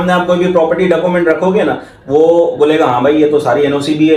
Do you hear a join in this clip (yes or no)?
no